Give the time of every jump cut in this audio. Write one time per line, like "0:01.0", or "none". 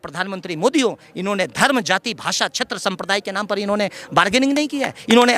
none

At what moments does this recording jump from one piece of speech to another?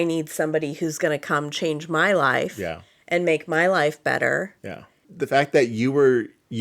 0:05.1

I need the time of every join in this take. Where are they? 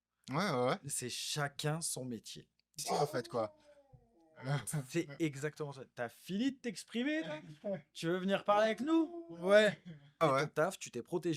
0:02.8
0:10.2

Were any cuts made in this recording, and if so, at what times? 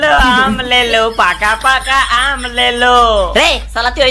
none

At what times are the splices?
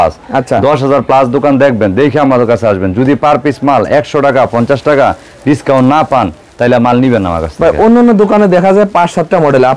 none

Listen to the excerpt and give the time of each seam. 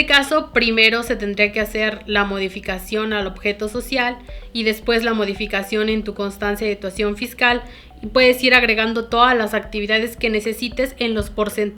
none

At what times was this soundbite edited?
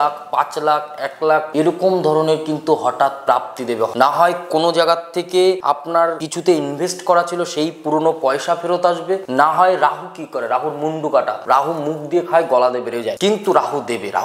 none

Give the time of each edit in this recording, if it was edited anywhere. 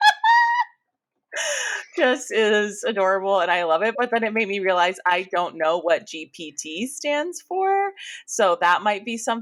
none

